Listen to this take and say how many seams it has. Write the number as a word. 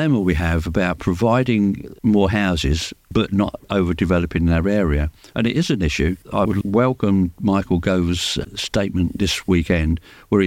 five